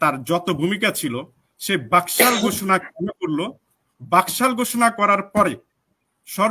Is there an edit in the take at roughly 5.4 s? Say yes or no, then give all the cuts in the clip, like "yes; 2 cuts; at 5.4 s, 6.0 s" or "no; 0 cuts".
no; 0 cuts